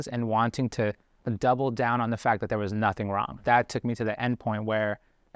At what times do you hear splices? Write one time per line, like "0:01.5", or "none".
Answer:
0:03.4